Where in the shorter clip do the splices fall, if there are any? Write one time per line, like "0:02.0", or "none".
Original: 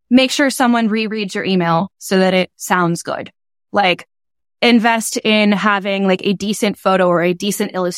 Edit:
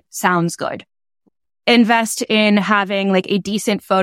0:01.1